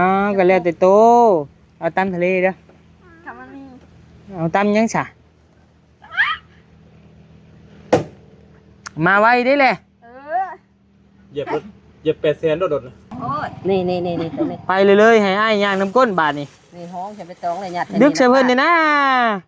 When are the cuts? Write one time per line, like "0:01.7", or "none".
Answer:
0:13.2